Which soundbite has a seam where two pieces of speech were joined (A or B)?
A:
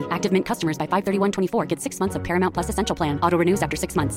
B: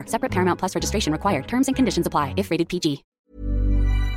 B